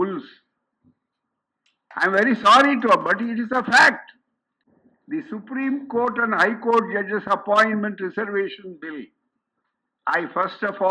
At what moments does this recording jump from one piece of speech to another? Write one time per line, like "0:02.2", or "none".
0:04.5